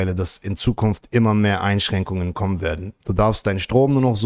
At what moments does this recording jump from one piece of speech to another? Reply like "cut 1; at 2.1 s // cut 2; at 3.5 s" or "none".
none